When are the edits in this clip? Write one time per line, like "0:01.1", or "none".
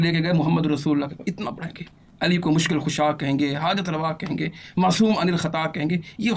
none